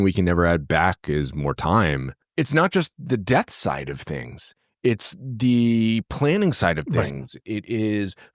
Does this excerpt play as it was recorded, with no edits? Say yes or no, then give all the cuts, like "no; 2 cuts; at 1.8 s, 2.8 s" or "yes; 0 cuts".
no; 1 cut; at 2.2 s